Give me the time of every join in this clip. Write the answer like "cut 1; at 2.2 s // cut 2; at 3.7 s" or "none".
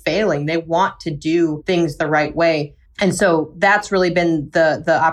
none

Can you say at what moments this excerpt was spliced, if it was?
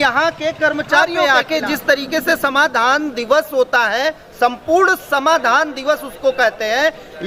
cut 1; at 1.1 s

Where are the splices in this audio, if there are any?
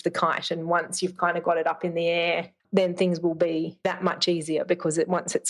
cut 1; at 3.8 s

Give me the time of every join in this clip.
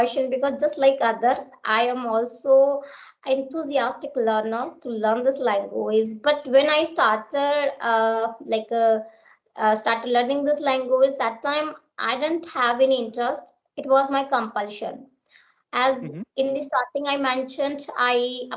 none

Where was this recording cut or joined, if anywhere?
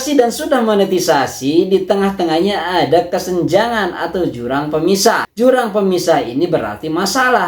none

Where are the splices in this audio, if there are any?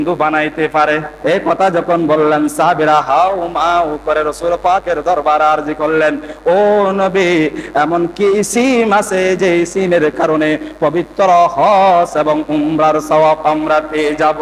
cut 1; at 1.1 s

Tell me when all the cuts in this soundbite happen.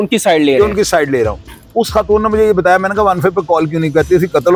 none

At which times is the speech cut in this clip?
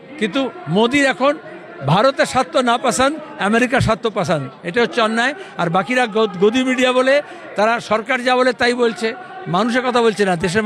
none

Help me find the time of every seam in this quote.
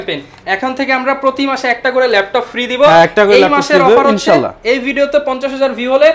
none

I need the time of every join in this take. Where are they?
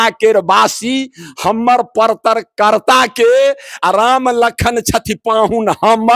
none

